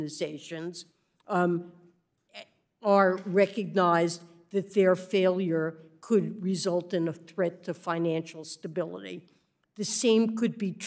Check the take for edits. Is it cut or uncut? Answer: cut